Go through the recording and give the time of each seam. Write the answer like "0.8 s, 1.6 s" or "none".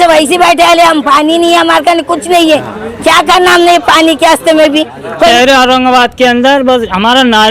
5.3 s

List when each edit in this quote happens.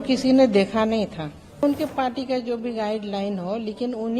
1.6 s

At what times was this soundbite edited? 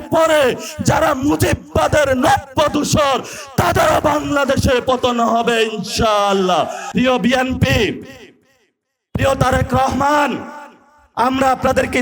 6.8 s

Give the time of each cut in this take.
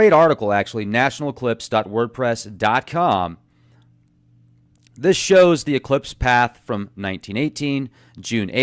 4.7 s

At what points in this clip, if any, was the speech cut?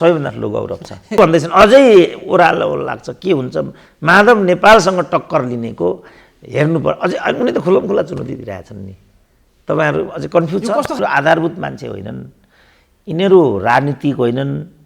1.2 s, 11.0 s

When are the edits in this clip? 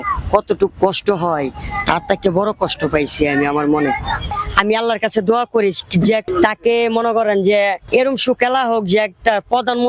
4.3 s, 6.3 s, 7.8 s

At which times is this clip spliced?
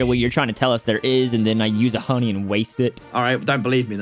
3.0 s

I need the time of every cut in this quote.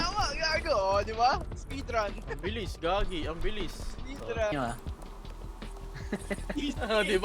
4.5 s

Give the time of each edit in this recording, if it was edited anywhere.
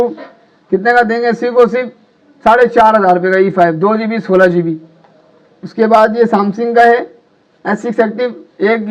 none

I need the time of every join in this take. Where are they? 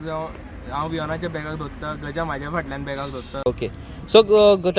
3.3 s

